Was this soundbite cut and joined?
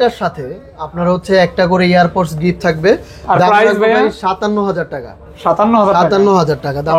no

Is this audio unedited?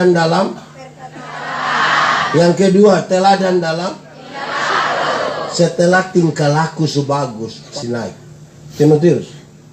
no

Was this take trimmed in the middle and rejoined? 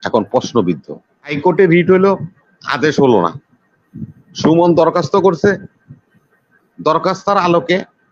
yes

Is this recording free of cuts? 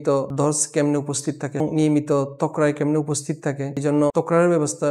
yes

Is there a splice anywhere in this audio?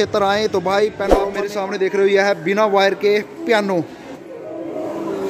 yes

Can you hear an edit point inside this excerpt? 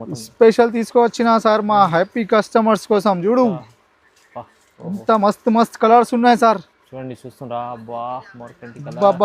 no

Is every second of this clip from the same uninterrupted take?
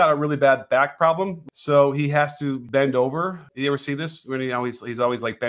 no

